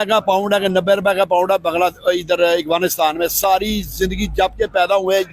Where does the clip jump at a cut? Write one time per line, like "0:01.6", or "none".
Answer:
none